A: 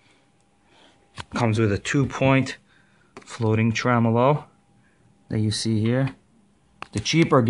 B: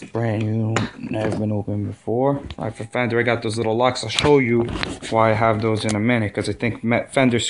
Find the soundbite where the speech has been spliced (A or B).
B